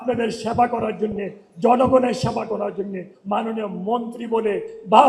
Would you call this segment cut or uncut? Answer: cut